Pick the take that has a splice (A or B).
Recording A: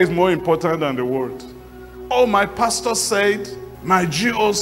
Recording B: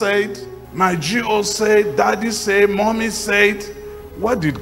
A